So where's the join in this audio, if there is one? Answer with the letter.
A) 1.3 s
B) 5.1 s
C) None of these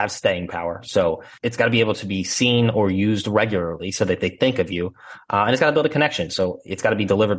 A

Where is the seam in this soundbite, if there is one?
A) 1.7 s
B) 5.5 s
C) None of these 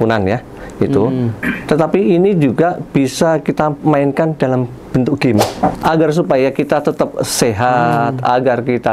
B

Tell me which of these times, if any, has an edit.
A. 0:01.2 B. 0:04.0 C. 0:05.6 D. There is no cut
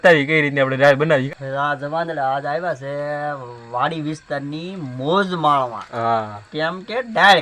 A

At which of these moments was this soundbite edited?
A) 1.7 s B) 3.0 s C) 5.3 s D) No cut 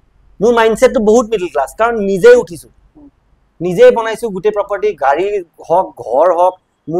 D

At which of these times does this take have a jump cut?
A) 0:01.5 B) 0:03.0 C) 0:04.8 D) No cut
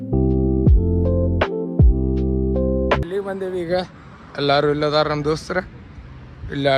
B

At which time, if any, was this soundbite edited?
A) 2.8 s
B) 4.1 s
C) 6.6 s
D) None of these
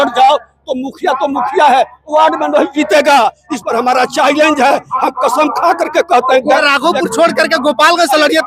C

